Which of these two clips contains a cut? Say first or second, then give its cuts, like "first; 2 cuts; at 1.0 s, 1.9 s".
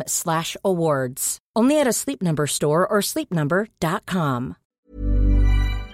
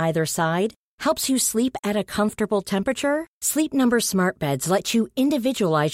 first; 1 cut; at 4.6 s